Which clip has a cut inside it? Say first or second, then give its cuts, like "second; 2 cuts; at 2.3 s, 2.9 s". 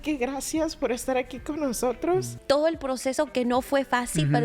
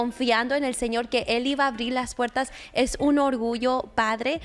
first; 1 cut; at 2.3 s